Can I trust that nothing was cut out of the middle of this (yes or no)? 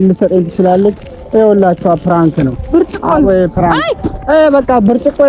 no